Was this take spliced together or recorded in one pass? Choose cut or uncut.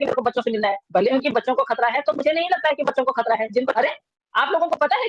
cut